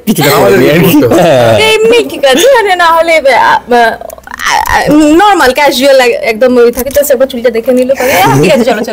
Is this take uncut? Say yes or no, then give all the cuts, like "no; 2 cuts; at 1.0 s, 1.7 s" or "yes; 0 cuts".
yes; 0 cuts